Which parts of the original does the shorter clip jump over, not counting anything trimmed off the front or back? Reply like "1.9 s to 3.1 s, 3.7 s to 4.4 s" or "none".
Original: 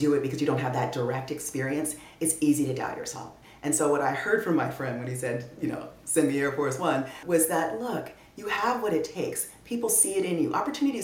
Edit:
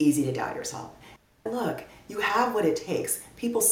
3.8 s to 7.7 s